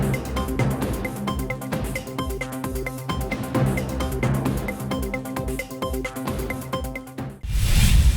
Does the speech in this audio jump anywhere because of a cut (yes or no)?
yes